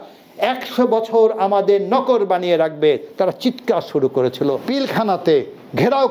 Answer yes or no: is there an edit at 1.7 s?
no